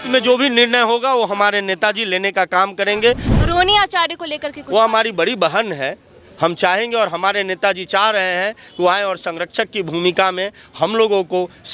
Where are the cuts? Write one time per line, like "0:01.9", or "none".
0:03.3